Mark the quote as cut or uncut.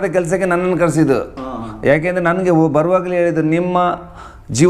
uncut